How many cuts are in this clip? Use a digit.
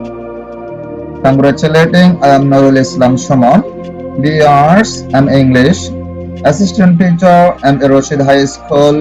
1